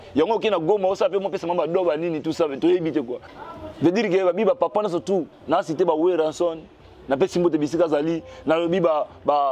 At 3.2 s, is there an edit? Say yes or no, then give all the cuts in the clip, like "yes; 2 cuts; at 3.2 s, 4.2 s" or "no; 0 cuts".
yes; 1 cut; at 3.2 s